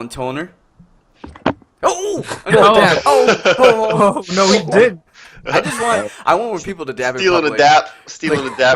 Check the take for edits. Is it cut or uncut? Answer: cut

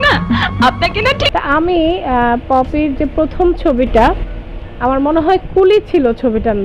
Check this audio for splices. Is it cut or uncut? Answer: cut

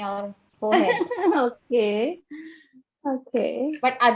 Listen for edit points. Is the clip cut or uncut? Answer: uncut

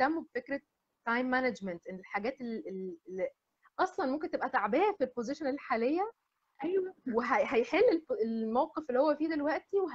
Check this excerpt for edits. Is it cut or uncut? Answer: uncut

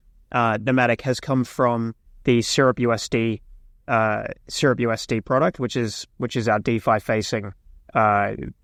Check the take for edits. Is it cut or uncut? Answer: uncut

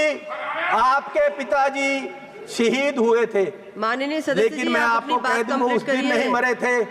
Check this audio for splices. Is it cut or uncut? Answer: uncut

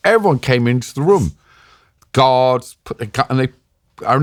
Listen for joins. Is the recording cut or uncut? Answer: uncut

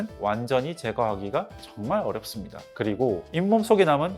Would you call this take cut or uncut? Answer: uncut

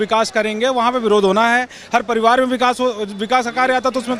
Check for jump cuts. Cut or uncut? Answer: uncut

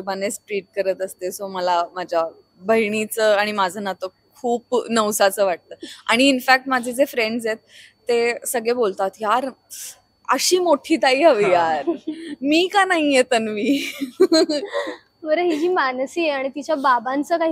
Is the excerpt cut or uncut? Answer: uncut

